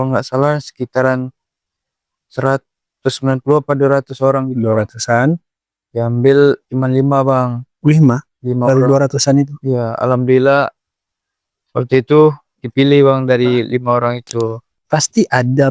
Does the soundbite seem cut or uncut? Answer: cut